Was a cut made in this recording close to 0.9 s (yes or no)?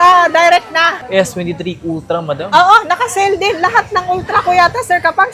yes